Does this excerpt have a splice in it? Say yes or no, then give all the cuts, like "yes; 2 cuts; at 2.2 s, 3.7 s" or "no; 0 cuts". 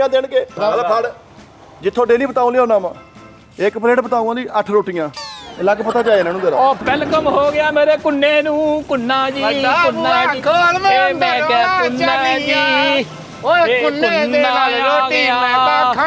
yes; 1 cut; at 6.8 s